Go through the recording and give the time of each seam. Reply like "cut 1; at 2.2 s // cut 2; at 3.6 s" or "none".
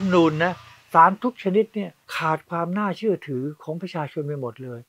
cut 1; at 2.0 s